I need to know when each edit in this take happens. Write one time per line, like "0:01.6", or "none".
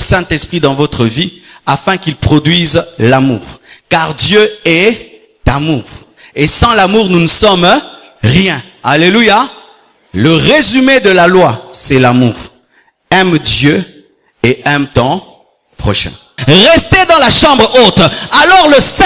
0:16.3

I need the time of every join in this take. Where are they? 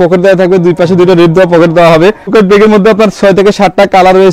0:02.3

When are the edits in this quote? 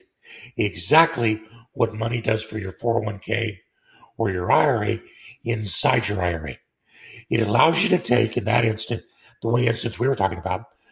none

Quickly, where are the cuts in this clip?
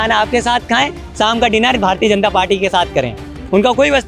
none

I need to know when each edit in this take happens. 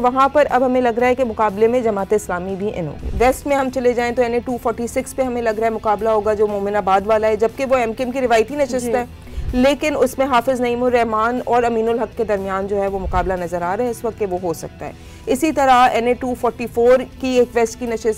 0:03.1

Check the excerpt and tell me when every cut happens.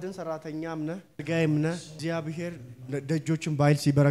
0:01.2
0:01.9

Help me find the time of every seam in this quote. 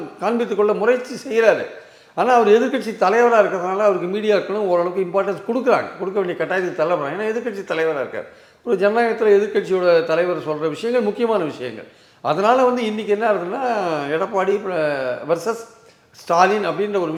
none

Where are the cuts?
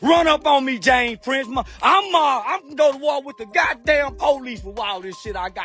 none

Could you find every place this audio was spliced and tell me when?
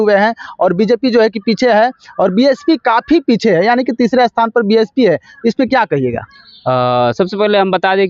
none

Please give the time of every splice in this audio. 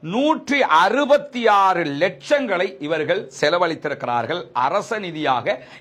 none

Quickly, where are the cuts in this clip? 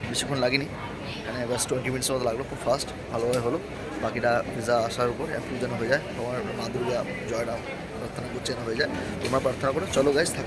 none

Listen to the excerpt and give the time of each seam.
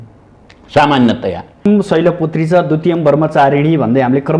0:01.6

